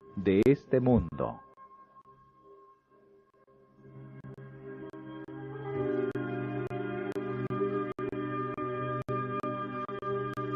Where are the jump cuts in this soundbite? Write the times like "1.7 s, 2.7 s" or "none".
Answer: none